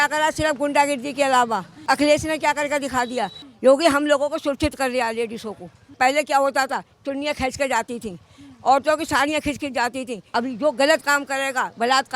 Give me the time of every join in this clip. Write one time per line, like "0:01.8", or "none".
0:01.8
0:03.4
0:05.9
0:10.2